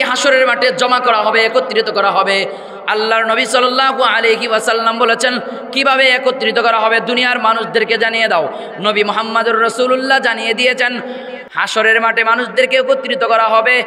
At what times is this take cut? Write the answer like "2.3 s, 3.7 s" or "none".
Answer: 11.4 s

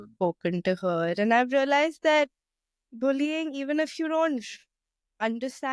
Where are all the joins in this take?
none

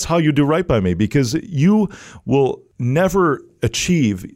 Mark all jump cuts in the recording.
2.7 s

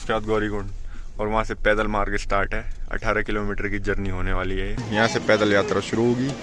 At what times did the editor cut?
4.8 s

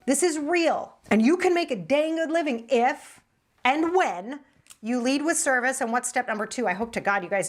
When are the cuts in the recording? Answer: 0.9 s

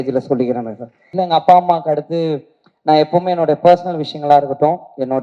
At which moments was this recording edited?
1.2 s

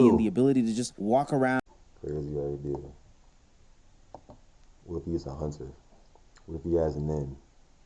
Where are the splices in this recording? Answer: 1.6 s

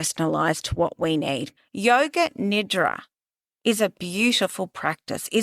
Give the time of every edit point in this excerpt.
1.5 s

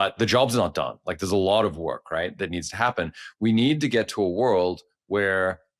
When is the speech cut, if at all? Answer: none

